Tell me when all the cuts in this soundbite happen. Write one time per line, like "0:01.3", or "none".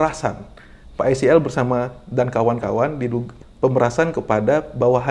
none